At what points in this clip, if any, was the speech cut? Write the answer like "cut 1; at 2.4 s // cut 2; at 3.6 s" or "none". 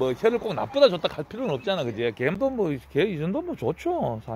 cut 1; at 2.4 s